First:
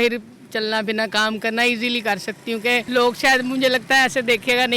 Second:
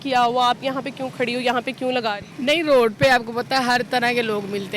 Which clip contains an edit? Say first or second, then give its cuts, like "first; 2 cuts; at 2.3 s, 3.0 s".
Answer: first; 1 cut; at 2.9 s